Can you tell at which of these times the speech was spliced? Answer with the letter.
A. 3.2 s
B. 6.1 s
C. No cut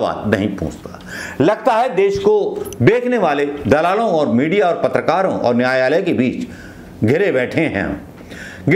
C